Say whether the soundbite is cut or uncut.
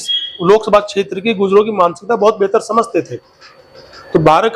uncut